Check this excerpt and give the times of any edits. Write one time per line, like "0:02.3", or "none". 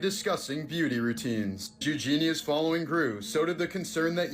0:01.8